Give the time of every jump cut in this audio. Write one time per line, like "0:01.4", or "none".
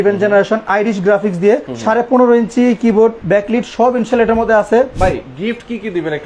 0:01.7
0:03.2
0:04.9